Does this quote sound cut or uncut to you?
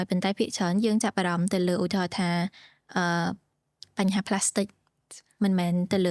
uncut